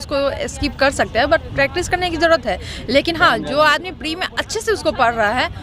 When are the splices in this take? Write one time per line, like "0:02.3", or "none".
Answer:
none